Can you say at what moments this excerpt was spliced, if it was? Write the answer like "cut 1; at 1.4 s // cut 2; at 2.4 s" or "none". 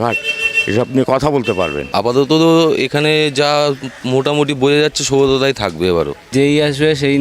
cut 1; at 1.8 s // cut 2; at 6.3 s